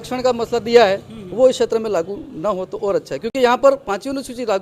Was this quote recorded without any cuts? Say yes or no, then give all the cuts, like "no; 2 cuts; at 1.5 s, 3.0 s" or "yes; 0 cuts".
yes; 0 cuts